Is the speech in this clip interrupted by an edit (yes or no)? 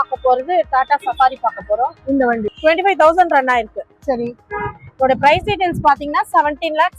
yes